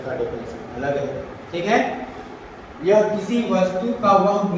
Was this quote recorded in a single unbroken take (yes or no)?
yes